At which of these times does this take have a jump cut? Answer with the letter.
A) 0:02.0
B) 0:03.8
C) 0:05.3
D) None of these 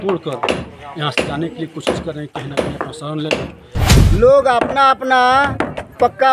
B